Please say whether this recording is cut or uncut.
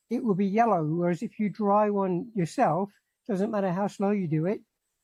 uncut